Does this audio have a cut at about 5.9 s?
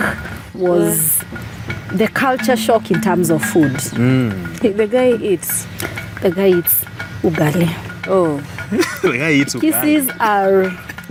no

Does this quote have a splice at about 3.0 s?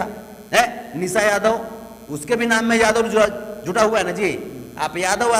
no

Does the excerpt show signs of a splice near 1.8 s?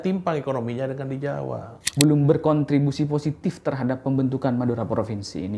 yes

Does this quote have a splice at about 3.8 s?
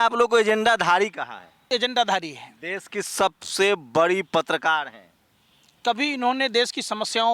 no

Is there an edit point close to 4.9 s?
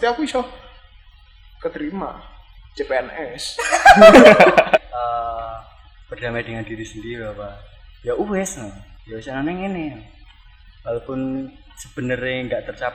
yes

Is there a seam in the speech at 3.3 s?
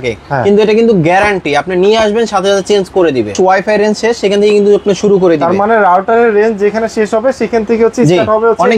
yes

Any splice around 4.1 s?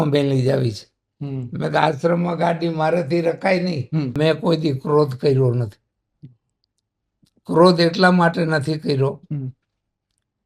yes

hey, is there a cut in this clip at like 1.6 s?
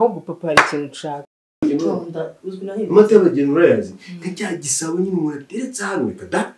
yes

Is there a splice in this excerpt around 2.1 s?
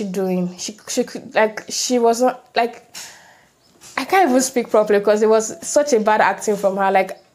no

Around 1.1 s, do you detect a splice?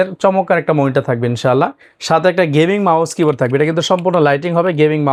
no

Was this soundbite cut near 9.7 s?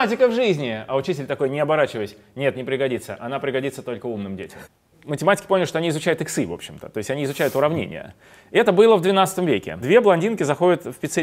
yes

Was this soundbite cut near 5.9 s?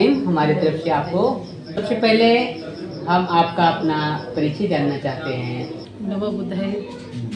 yes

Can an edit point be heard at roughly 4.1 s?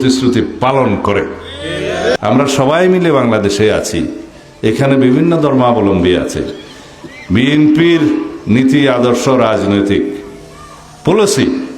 no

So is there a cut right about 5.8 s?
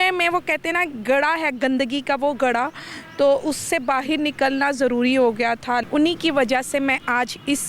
yes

